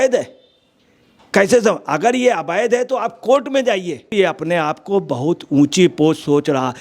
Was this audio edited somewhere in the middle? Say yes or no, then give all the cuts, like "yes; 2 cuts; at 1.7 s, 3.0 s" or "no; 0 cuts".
yes; 1 cut; at 4.1 s